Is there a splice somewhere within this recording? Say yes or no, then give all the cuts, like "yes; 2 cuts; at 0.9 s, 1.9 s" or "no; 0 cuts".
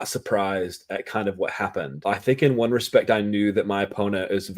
yes; 1 cut; at 1.9 s